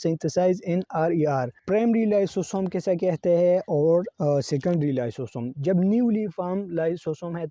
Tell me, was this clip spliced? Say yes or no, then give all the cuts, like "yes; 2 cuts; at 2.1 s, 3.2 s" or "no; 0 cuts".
yes; 1 cut; at 1.6 s